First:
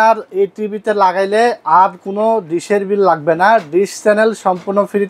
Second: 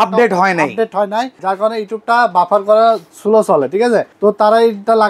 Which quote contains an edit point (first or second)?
second